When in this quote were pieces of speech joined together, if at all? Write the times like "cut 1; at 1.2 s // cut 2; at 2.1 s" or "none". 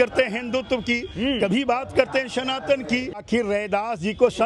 cut 1; at 3.2 s